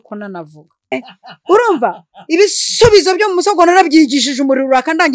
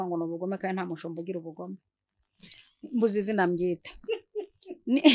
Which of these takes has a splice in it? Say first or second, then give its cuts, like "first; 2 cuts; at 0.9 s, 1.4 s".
first; 1 cut; at 0.9 s